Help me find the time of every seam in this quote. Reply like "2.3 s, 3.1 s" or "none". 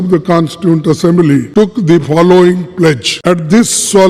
1.5 s, 3.1 s